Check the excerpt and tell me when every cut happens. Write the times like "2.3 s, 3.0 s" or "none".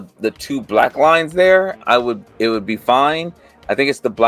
none